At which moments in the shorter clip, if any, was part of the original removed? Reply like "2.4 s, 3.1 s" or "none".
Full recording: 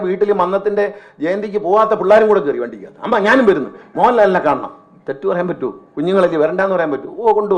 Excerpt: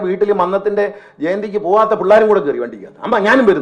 none